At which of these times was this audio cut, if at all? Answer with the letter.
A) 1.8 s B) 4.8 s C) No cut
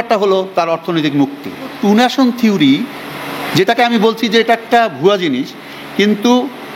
A